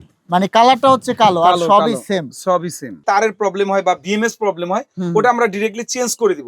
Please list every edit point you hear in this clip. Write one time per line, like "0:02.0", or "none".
0:03.0